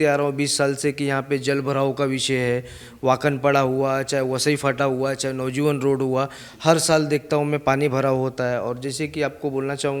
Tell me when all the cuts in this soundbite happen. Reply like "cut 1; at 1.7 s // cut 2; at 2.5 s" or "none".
none